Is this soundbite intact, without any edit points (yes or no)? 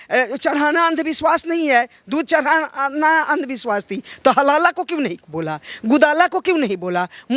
yes